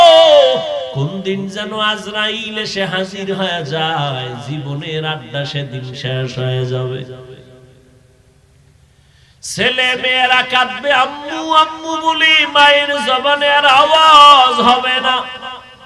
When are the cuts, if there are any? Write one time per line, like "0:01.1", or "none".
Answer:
0:00.9